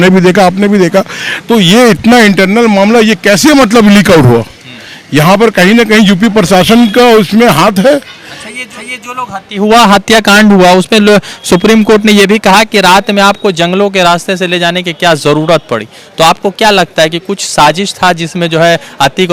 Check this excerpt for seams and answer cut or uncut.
uncut